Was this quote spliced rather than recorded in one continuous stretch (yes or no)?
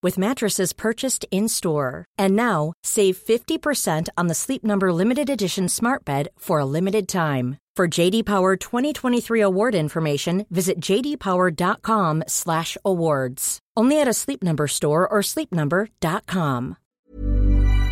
yes